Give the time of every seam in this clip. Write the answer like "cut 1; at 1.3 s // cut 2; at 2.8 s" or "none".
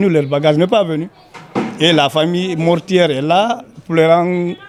none